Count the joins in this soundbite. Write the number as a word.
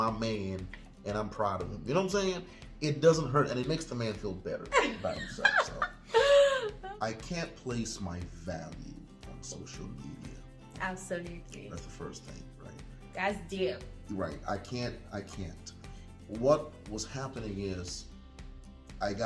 two